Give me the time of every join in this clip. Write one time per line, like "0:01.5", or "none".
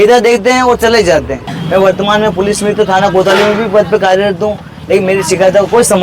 0:01.6